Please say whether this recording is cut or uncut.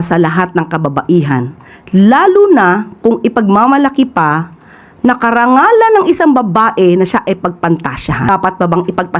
cut